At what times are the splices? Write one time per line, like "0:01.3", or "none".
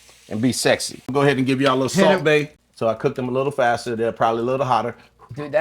0:01.1
0:02.6